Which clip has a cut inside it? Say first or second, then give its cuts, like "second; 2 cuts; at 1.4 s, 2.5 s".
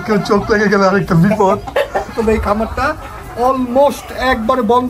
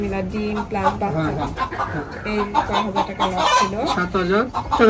first; 1 cut; at 2.1 s